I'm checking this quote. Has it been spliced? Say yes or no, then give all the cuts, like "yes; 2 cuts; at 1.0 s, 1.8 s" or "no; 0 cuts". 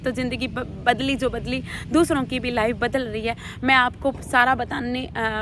no; 0 cuts